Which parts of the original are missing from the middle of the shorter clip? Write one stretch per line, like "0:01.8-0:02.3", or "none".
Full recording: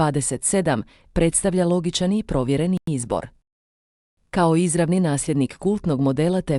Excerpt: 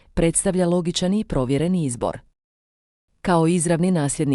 0:02.8-0:02.9

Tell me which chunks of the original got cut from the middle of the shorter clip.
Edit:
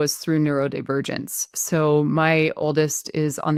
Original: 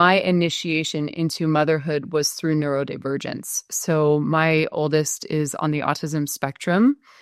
none

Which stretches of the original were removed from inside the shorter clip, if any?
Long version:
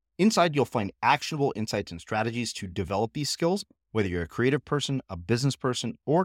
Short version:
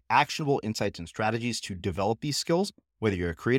none

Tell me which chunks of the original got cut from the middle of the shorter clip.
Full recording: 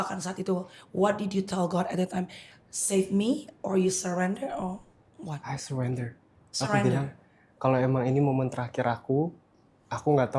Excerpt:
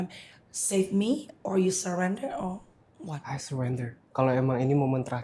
0:06.2-0:07.4

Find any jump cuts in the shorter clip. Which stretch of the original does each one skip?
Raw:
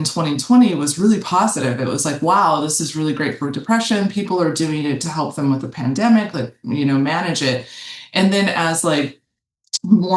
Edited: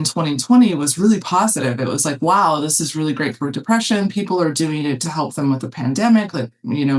none

